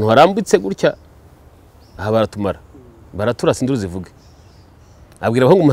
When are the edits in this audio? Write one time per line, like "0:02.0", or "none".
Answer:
none